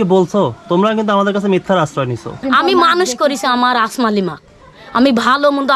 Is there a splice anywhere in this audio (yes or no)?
yes